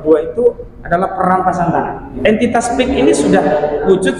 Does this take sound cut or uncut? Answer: cut